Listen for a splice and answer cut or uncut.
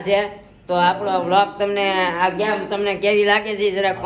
uncut